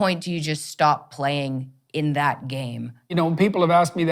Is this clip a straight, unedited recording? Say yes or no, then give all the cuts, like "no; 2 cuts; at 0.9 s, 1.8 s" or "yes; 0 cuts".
no; 1 cut; at 3.2 s